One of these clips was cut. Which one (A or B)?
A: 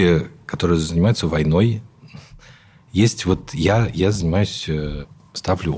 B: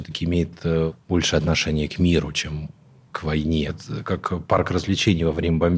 B